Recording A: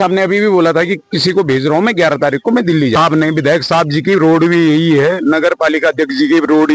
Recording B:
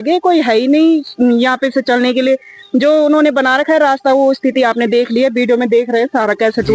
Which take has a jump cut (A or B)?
A